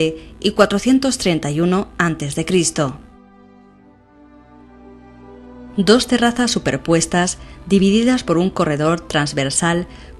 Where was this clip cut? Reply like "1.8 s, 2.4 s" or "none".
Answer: none